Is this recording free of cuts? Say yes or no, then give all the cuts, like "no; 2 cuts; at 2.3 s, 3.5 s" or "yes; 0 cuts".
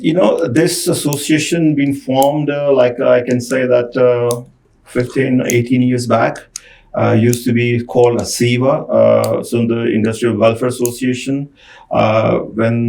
yes; 0 cuts